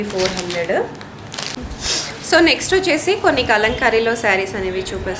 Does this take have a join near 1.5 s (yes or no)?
yes